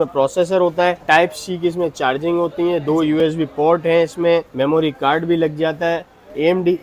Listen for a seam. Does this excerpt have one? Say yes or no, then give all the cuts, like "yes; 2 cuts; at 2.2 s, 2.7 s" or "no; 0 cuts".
no; 0 cuts